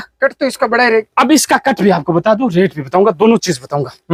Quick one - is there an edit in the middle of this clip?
no; 0 cuts

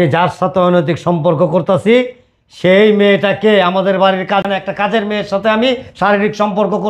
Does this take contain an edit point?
yes; 1 cut; at 4.4 s

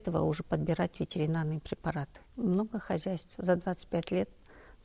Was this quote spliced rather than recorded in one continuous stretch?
yes; 1 cut; at 2.2 s

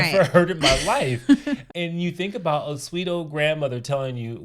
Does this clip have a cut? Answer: yes; 1 cut; at 1.6 s

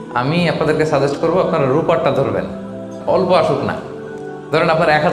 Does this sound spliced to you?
yes; 1 cut; at 3.0 s

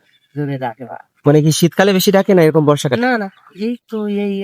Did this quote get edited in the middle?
no; 0 cuts

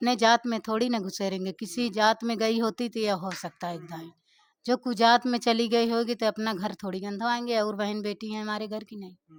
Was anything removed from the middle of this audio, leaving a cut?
no; 0 cuts

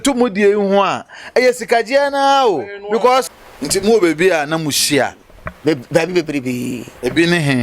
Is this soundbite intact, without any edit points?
no; 1 cut; at 3.3 s

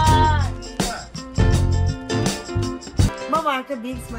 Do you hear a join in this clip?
yes; 1 cut; at 3.2 s

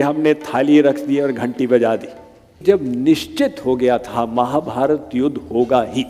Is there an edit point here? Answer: yes; 1 cut; at 2.6 s

